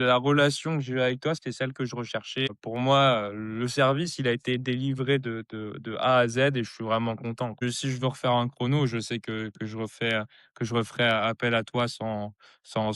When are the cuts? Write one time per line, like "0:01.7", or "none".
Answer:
0:02.5
0:07.6

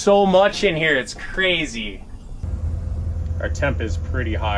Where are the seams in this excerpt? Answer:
0:02.4

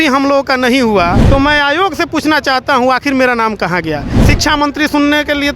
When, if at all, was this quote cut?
0:01.2
0:04.1

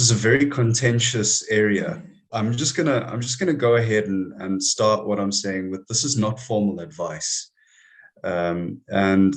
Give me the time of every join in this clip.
0:02.2

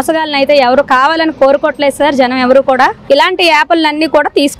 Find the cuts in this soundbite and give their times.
0:03.0

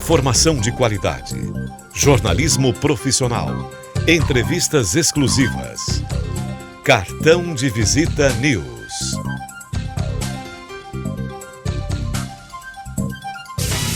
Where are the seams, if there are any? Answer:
0:08.7
0:10.6

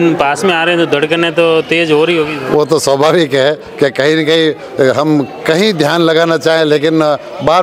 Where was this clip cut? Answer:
none

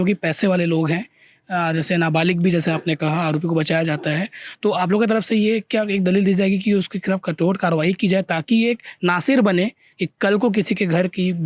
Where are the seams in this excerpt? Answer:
none

